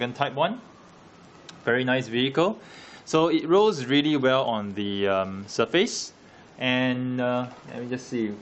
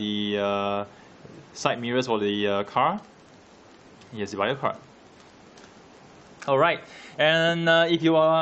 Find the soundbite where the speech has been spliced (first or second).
first